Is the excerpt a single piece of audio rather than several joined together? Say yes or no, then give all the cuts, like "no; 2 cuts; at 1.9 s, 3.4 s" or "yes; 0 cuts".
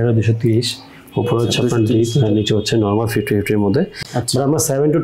no; 1 cut; at 4.0 s